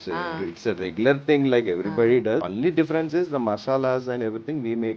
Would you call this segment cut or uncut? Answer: cut